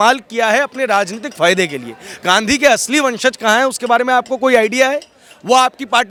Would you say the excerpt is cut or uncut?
uncut